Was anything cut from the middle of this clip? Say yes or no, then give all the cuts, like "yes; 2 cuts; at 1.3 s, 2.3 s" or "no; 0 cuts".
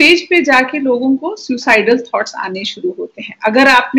no; 0 cuts